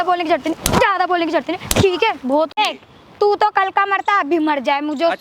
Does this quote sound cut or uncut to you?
cut